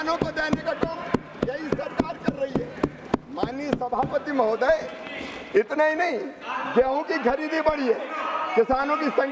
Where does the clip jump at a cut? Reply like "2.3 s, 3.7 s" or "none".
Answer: none